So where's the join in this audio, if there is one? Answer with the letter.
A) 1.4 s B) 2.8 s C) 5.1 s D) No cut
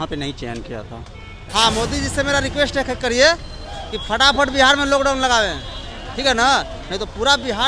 A